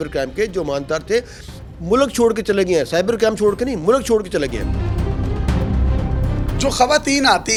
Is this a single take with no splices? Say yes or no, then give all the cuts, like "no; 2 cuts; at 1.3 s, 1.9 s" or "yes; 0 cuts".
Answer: yes; 0 cuts